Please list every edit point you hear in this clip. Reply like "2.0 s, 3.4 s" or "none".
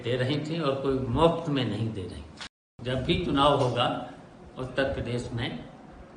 2.7 s

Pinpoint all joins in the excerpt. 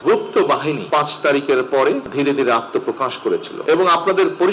0.8 s, 2.1 s, 3.5 s

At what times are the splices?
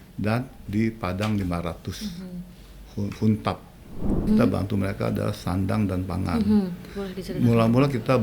4.2 s

